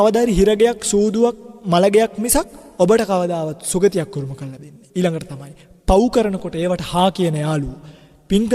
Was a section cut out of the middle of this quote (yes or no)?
yes